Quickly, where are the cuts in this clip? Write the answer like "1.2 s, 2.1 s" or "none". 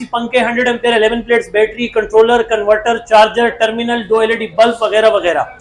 none